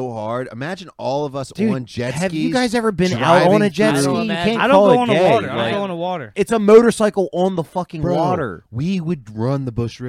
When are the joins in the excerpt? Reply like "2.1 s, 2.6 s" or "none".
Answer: 6.3 s